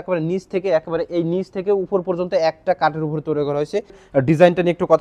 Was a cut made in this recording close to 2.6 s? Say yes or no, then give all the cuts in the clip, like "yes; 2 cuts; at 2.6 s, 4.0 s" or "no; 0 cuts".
no; 1 cut; at 4.0 s